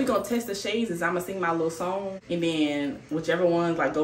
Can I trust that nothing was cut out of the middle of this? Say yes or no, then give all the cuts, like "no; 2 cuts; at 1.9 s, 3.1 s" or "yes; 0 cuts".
no; 1 cut; at 2.2 s